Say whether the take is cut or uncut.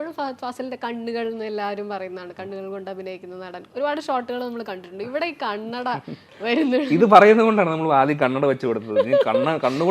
uncut